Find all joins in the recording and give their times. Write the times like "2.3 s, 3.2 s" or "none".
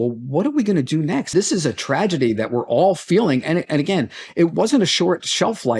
1.3 s, 4.5 s